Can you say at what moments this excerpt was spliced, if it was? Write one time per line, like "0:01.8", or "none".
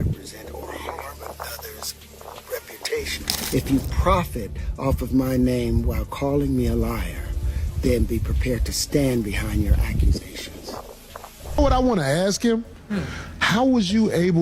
0:03.4
0:11.6

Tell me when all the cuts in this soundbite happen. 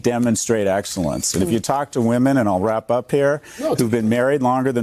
0:01.3

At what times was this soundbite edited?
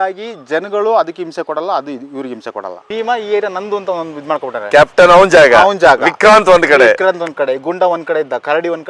0:02.7

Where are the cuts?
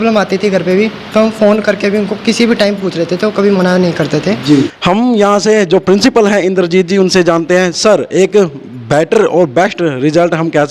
none

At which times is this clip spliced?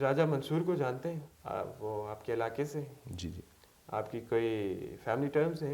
0:01.3

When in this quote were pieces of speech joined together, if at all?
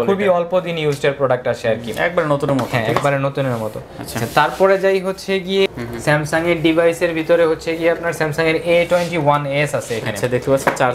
0:05.7

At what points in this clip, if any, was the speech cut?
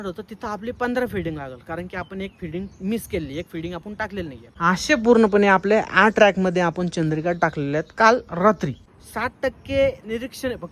0:04.4
0:08.8

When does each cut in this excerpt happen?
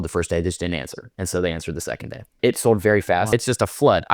0:02.2
0:03.3

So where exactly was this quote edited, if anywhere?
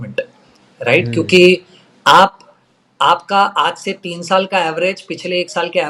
none

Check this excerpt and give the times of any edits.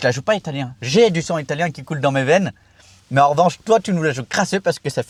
none

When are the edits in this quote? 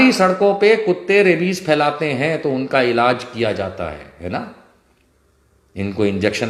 none

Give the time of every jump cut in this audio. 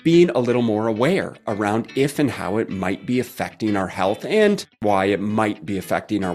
0:04.7

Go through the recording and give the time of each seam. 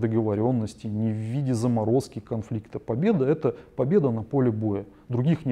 none

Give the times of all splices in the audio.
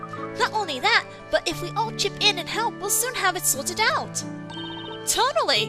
none

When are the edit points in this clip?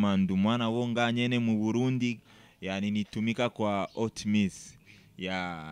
0:02.2

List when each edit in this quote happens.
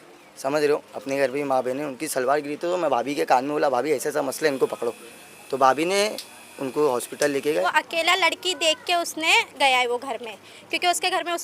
0:07.6

